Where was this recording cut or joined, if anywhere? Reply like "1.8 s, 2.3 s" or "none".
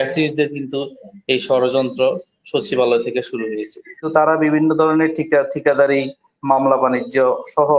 4.0 s